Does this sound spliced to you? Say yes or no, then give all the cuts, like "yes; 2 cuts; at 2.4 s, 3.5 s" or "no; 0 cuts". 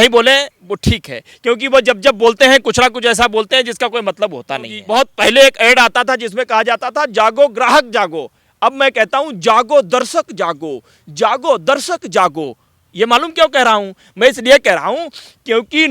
yes; 1 cut; at 4.8 s